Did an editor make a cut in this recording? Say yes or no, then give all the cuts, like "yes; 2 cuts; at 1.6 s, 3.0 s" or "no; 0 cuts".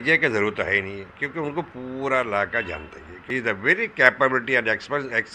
yes; 1 cut; at 3.2 s